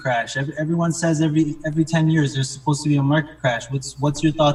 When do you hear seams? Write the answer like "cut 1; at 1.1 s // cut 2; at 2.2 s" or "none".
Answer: none

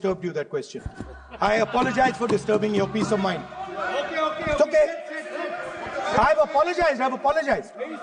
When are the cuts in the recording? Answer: none

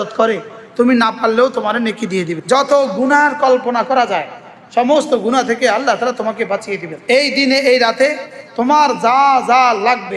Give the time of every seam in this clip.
cut 1; at 2.4 s // cut 2; at 6.9 s

